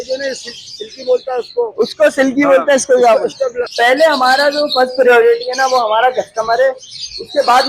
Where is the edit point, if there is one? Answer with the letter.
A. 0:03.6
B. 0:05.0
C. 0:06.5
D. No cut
A